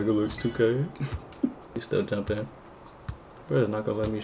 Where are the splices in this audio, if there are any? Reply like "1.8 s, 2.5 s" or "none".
1.8 s